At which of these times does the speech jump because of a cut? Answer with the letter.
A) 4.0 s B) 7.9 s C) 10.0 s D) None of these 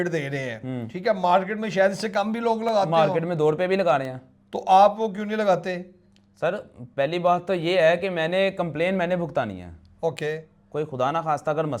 D